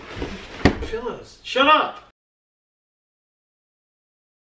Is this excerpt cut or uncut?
uncut